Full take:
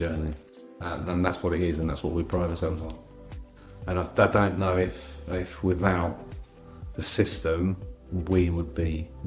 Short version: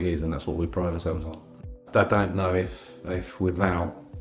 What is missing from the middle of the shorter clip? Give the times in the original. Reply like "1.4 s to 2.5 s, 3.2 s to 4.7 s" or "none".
3.4 s to 4.1 s

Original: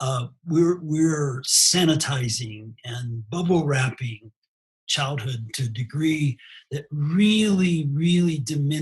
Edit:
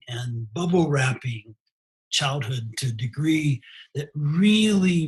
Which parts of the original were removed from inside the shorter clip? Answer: none

